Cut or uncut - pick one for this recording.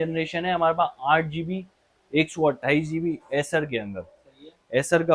uncut